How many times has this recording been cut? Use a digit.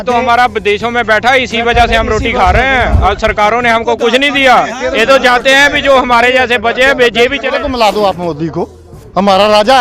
1